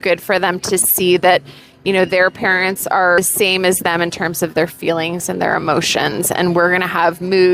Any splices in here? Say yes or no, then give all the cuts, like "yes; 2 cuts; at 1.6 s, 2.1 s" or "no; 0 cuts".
yes; 1 cut; at 3.2 s